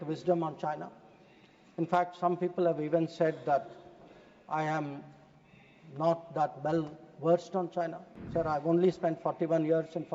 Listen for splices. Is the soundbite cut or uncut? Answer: uncut